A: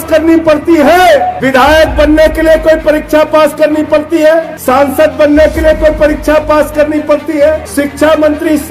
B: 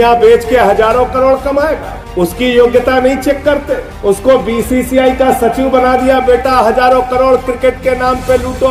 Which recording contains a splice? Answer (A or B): A